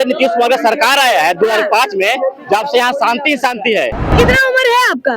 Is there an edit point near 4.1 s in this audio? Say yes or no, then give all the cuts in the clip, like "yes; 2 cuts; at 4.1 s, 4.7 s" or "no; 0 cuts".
yes; 1 cut; at 4.1 s